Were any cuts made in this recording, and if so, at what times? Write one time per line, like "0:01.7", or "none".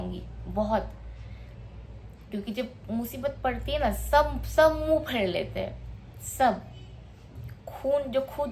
none